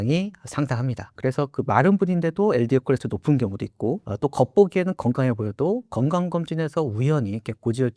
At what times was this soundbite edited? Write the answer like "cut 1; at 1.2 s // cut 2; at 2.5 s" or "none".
cut 1; at 1.1 s // cut 2; at 4.1 s